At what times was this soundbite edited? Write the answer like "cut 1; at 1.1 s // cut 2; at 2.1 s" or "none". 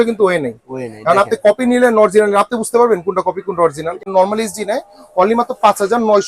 cut 1; at 4.1 s